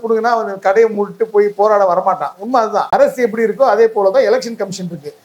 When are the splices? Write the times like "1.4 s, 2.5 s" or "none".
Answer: 2.8 s